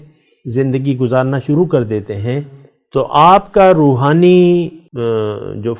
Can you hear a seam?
yes; 1 cut; at 4.8 s

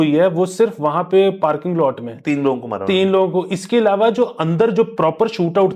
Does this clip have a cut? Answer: no; 0 cuts

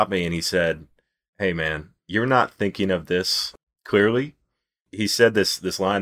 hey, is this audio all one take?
no; 3 cuts; at 1.5 s, 3.4 s, 4.8 s

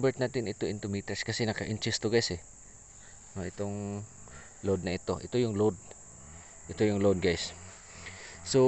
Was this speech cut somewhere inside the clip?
no; 0 cuts

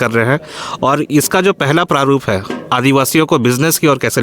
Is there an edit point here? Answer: yes; 1 cut; at 2.6 s

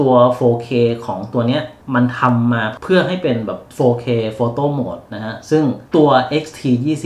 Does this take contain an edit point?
no; 0 cuts

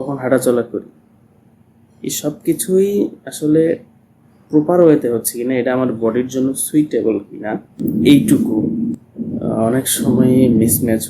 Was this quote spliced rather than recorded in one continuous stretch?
yes; 2 cuts; at 7.8 s, 9.0 s

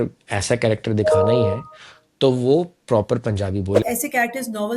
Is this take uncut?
no; 1 cut; at 3.8 s

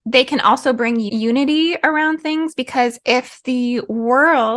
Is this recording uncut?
no; 1 cut; at 1.1 s

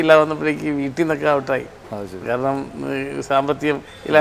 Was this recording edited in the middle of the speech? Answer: no; 0 cuts

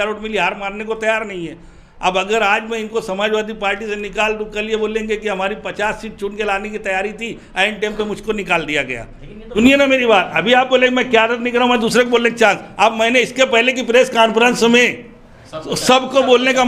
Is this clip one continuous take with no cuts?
no; 1 cut; at 9.6 s

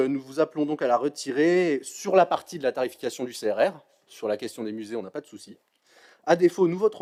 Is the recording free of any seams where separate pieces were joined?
yes; 0 cuts

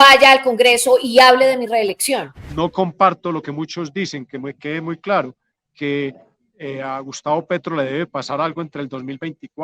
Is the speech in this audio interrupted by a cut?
yes; 1 cut; at 2.4 s

